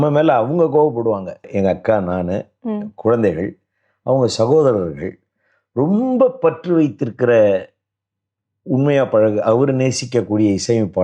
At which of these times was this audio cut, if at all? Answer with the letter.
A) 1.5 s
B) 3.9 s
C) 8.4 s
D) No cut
A